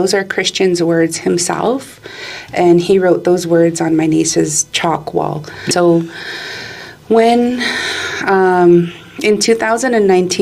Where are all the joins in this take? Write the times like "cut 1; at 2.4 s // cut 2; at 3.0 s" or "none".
cut 1; at 5.7 s